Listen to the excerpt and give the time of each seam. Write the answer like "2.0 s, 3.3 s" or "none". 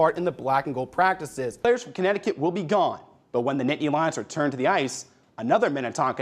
1.7 s